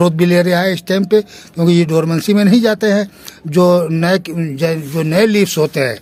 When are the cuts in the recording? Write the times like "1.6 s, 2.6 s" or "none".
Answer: none